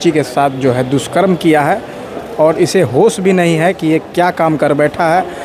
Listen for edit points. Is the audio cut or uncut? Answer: uncut